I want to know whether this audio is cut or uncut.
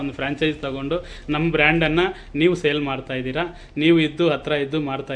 uncut